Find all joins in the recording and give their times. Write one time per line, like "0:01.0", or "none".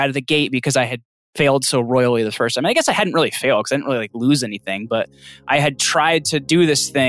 0:01.3